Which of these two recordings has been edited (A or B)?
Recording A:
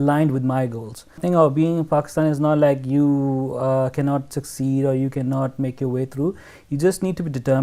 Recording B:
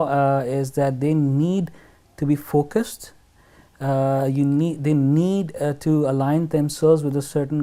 A